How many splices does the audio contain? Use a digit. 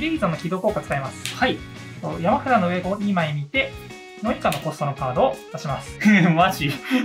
2